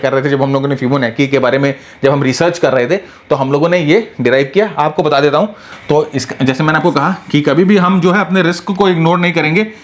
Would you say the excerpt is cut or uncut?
cut